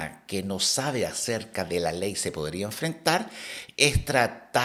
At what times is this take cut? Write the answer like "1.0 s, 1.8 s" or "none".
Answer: none